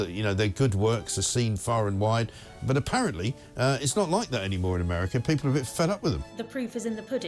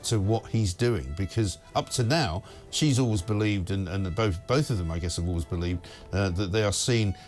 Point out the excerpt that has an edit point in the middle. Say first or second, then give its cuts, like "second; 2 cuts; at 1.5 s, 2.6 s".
first; 1 cut; at 6.3 s